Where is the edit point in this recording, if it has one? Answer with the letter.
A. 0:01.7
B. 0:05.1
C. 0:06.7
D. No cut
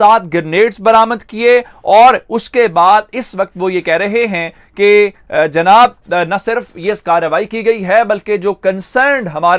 D